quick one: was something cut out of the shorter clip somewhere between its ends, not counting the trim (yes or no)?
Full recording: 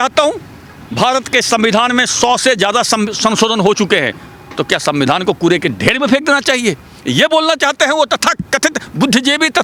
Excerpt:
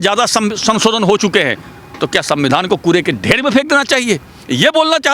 no